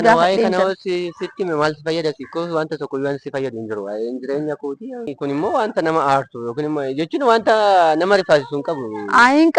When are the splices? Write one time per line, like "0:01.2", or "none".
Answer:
none